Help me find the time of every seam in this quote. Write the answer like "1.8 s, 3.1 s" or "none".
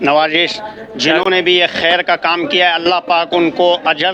none